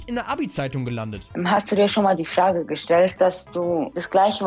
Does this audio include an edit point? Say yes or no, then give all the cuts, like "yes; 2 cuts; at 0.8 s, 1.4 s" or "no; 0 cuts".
yes; 2 cuts; at 1.2 s, 3.1 s